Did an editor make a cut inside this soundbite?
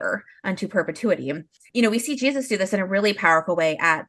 yes; 1 cut; at 1.6 s

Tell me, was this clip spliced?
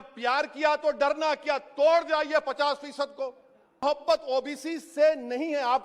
yes; 1 cut; at 3.8 s

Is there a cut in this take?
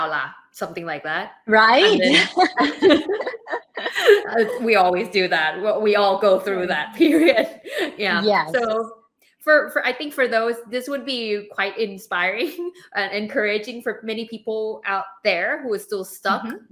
no; 0 cuts

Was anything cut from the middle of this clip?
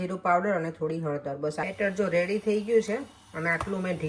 yes; 1 cut; at 1.7 s

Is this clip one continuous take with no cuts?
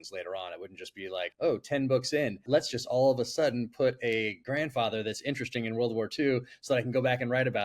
no; 2 cuts; at 1.3 s, 2.4 s

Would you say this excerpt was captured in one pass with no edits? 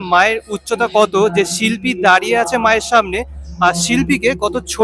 yes; 0 cuts

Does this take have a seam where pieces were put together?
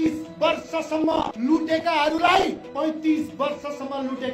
yes; 2 cuts; at 1.3 s, 2.6 s

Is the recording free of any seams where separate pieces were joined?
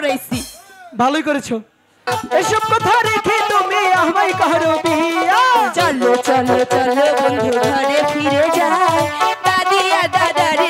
no; 1 cut; at 2.0 s

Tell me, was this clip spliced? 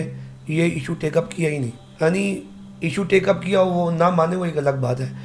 yes; 1 cut; at 1.8 s

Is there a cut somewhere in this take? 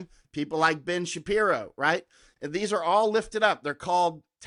no; 0 cuts

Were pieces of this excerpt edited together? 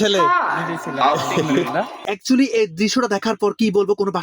yes; 1 cut; at 2.1 s

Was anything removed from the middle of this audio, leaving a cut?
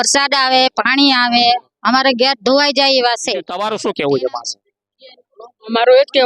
no; 0 cuts

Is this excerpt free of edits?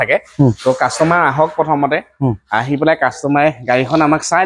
yes; 0 cuts

